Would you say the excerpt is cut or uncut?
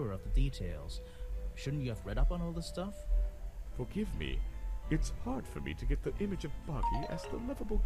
uncut